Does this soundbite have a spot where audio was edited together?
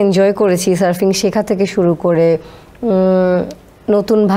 no; 0 cuts

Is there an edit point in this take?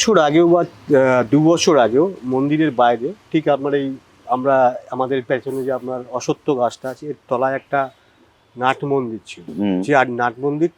no; 0 cuts

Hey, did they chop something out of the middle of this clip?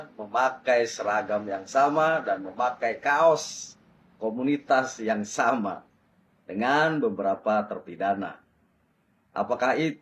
no; 0 cuts

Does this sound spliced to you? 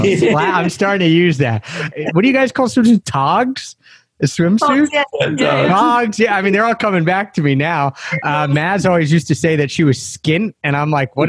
yes; 1 cut; at 1.9 s

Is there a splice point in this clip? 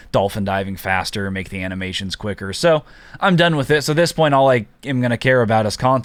no; 0 cuts

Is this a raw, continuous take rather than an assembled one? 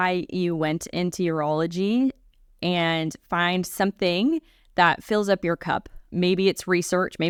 yes; 0 cuts

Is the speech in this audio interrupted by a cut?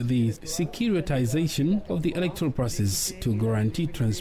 yes; 2 cuts; at 1.9 s, 3.2 s

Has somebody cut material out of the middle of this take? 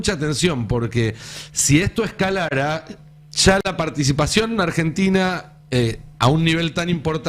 no; 0 cuts

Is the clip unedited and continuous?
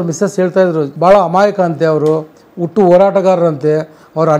no; 1 cut; at 0.9 s

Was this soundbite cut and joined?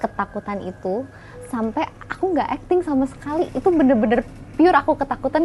no; 0 cuts

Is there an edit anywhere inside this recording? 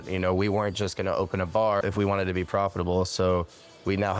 yes; 1 cut; at 1.8 s

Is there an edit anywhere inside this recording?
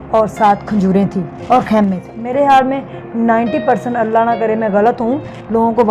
yes; 1 cut; at 2.1 s

